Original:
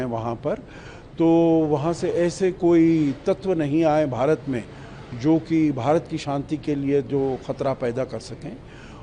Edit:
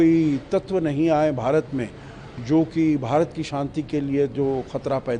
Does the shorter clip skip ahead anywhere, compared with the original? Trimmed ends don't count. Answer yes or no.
no